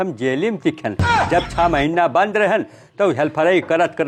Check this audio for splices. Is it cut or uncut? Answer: uncut